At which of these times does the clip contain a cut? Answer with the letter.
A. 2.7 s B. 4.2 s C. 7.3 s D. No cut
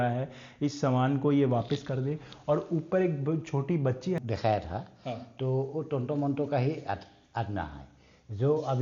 B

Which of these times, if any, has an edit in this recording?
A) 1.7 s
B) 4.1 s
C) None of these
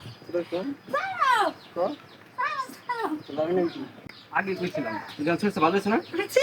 B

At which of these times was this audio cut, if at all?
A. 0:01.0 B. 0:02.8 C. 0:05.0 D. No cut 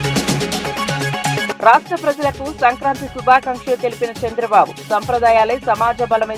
A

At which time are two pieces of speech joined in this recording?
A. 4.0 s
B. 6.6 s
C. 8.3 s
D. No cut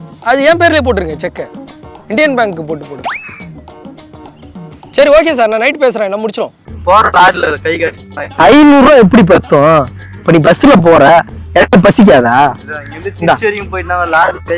B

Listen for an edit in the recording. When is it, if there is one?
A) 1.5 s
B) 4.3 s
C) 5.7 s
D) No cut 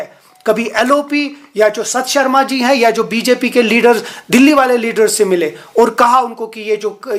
D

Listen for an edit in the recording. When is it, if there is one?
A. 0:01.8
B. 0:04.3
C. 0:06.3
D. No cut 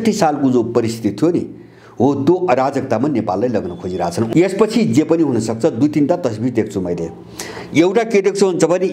B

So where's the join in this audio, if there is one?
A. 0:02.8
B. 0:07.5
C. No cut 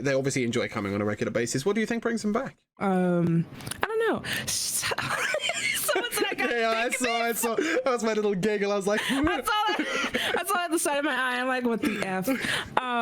A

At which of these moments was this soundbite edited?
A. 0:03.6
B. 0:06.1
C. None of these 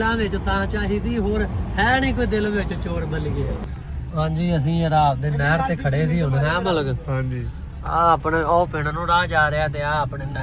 A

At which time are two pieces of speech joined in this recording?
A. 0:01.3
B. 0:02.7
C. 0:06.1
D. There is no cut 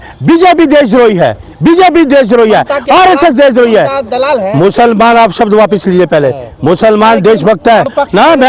D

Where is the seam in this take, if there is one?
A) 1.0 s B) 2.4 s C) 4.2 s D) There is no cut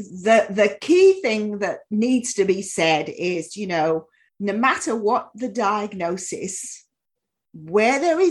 C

